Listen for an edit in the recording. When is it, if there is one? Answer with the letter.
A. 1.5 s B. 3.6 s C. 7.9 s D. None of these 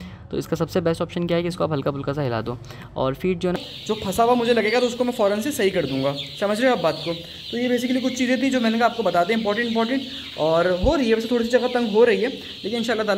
B